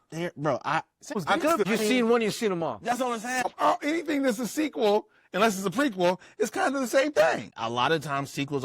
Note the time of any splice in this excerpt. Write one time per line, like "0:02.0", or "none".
0:01.4
0:03.4
0:07.5